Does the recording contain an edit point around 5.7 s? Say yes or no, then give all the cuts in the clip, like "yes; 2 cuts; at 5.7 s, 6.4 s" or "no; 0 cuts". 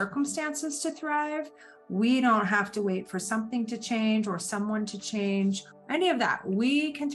yes; 1 cut; at 5.7 s